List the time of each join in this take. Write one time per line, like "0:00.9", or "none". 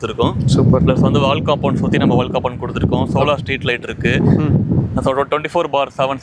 none